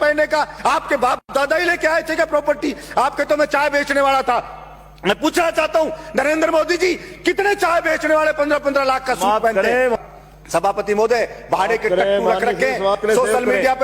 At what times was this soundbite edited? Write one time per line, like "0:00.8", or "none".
0:10.0